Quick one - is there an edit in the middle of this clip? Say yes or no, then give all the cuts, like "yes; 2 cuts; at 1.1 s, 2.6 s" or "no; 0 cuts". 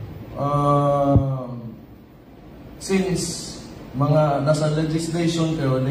no; 0 cuts